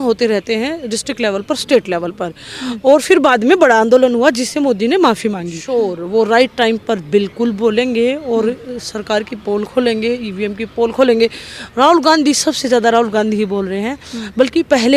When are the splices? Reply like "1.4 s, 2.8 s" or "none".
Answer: 5.6 s